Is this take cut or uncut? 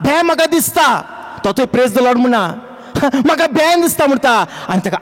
uncut